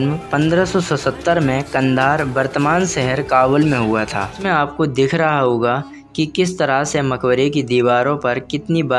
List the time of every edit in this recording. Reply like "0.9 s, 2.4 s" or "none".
4.4 s